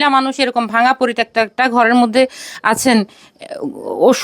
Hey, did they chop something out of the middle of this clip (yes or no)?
no